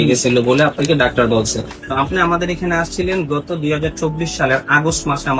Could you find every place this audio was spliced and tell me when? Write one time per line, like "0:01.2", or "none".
0:01.8